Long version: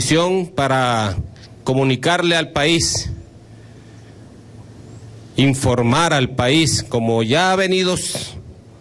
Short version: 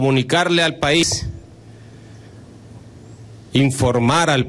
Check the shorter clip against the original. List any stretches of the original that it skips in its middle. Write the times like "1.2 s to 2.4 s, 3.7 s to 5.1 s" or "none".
2.8 s to 2.9 s